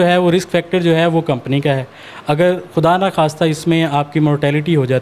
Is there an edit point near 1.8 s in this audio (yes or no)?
no